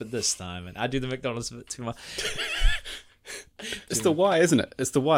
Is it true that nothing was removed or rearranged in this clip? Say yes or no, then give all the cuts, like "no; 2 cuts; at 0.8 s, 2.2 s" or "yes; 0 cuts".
no; 1 cut; at 3.8 s